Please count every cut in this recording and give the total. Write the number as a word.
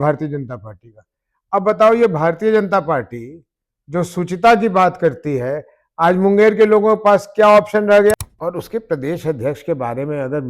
one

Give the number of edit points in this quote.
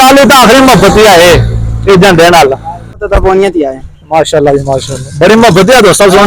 one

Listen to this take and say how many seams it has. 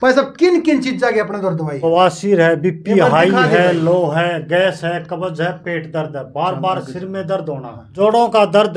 one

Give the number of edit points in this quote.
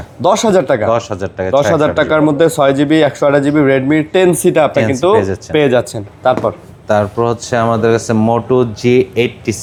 zero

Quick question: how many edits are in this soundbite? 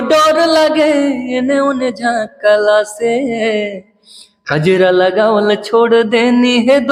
zero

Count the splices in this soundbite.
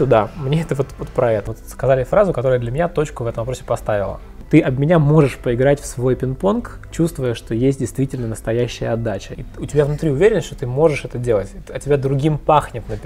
three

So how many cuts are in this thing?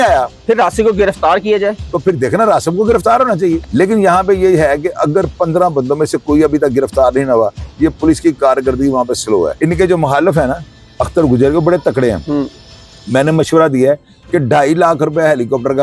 two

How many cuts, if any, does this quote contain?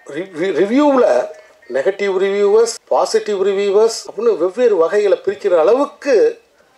two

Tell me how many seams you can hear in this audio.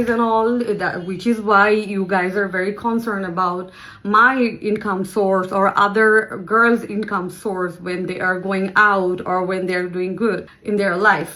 zero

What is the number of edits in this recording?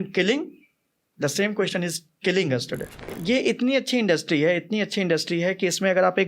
one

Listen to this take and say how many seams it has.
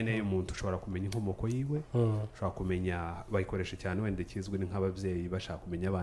zero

